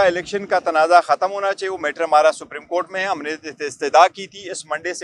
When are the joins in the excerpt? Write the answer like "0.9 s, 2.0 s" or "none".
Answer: none